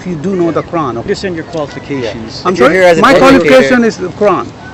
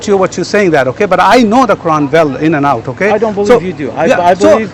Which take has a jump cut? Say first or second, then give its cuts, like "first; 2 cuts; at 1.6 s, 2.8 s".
first; 1 cut; at 1.1 s